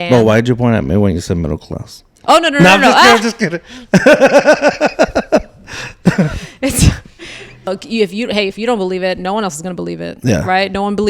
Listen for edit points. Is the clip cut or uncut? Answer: cut